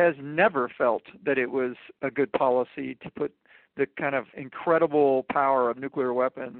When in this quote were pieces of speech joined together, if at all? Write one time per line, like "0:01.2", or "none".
0:04.3